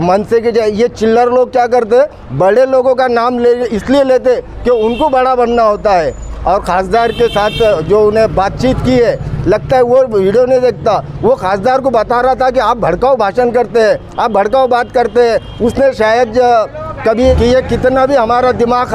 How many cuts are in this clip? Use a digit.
1